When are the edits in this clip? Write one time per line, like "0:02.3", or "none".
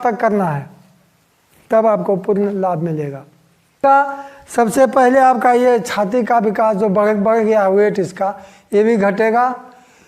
0:03.8